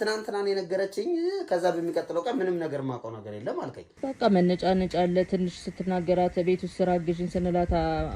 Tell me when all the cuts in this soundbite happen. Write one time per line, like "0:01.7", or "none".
0:03.9